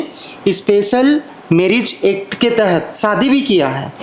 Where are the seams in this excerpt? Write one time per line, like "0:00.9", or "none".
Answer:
none